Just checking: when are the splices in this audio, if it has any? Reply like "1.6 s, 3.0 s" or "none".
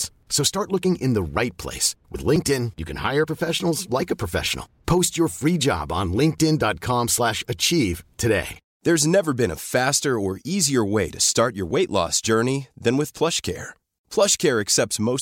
8.7 s